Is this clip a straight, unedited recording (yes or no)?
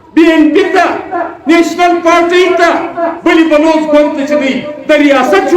yes